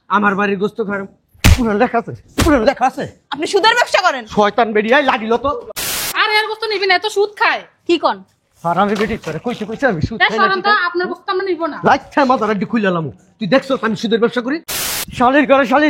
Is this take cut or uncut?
cut